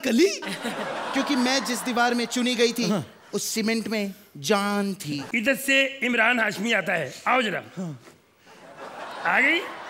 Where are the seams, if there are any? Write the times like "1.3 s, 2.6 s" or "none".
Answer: 5.2 s